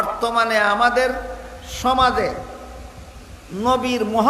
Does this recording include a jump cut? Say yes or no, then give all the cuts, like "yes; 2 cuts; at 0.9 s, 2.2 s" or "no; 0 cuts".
no; 0 cuts